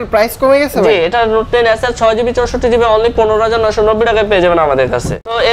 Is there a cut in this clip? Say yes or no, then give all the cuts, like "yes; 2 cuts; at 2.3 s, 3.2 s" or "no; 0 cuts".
no; 0 cuts